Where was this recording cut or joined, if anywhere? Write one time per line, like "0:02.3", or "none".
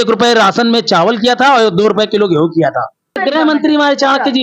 0:03.2